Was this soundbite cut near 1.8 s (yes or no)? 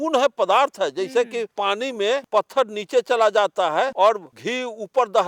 yes